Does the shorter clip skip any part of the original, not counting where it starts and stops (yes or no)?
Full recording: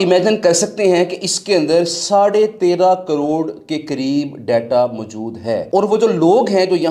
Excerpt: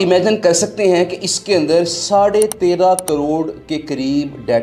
no